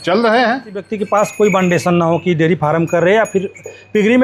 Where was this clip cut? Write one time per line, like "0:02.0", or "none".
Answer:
0:00.9